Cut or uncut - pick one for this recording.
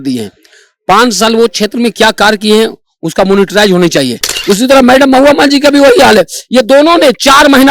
cut